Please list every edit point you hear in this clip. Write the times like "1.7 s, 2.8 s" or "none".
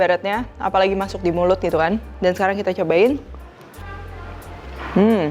2.1 s